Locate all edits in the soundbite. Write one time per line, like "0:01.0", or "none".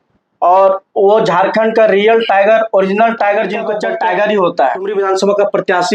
0:03.7
0:04.9